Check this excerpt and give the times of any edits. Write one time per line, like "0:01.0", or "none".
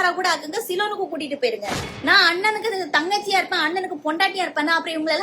0:01.9